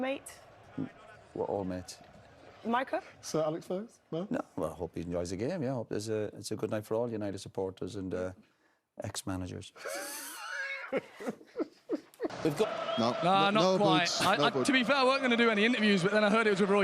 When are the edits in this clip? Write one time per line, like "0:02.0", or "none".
0:12.6